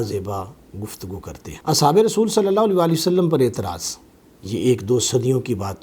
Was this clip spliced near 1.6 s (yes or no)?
no